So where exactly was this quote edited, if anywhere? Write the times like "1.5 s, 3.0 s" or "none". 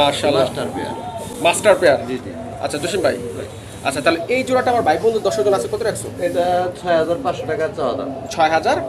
none